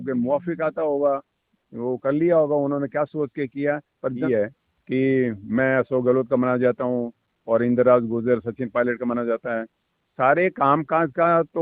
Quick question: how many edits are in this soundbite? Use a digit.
1